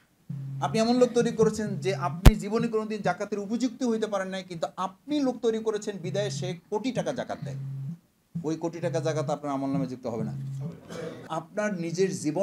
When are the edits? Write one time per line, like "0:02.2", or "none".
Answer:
0:11.3